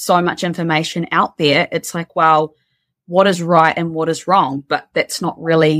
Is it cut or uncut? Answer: uncut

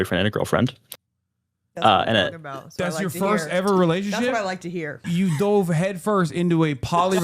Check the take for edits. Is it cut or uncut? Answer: cut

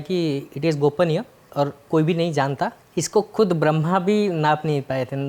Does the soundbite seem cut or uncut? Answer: cut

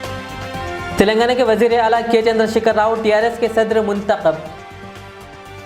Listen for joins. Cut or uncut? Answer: cut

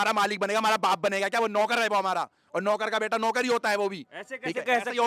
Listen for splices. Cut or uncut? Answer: uncut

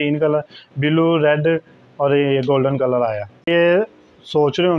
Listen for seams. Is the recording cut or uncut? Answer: cut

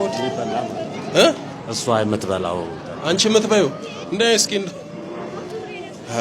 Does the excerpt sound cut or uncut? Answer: uncut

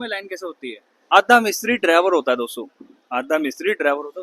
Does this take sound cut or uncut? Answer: cut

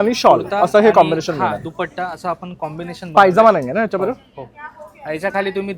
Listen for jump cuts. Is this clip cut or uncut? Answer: uncut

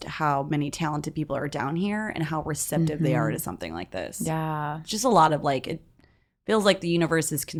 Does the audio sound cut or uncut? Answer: uncut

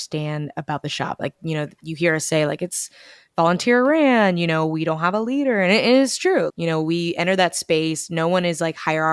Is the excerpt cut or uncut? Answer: uncut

